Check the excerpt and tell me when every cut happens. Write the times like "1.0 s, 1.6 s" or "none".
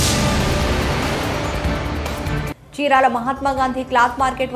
2.2 s